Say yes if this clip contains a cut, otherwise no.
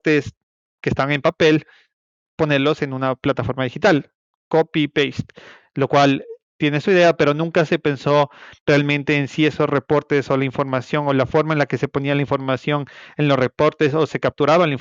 no